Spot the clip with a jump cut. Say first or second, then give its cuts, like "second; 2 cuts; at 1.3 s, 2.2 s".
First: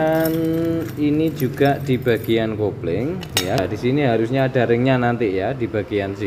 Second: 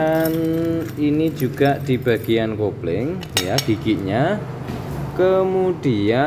first; 1 cut; at 3.6 s